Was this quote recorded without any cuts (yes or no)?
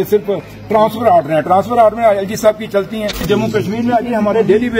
no